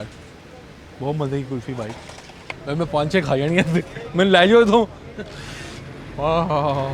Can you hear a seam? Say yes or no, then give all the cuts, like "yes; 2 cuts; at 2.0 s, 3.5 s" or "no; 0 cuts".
no; 0 cuts